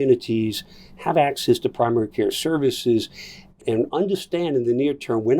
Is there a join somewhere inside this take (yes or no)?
yes